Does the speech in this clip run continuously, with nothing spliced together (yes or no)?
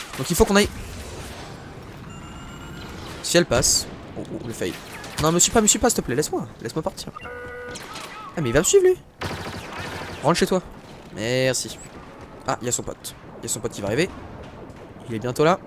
no